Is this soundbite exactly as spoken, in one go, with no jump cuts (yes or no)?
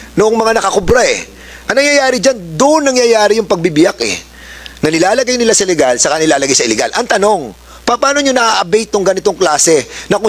yes